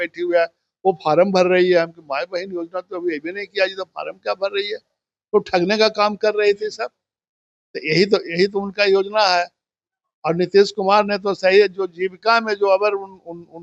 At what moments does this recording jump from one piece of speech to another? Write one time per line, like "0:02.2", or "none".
none